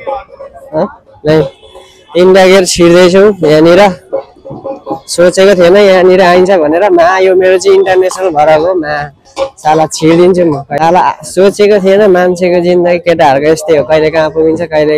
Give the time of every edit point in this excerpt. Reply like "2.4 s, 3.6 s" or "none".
10.7 s